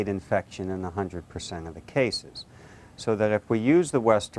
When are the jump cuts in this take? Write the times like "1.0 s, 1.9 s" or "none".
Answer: none